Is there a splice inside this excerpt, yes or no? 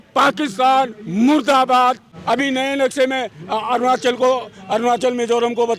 yes